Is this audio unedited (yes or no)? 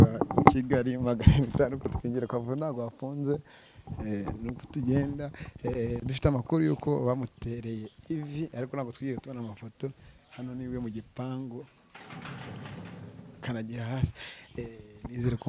yes